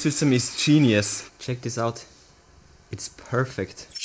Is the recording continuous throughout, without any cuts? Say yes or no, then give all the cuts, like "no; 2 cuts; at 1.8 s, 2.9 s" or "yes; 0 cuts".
yes; 0 cuts